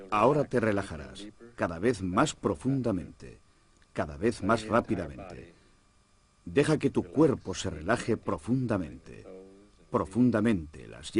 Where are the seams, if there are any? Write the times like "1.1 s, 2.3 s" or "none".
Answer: 1.5 s